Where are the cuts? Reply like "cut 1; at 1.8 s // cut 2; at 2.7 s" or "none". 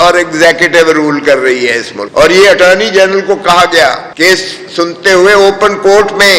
cut 1; at 2.0 s